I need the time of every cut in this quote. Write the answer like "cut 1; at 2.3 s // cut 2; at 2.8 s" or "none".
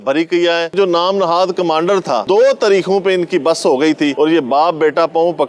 cut 1; at 0.7 s // cut 2; at 2.2 s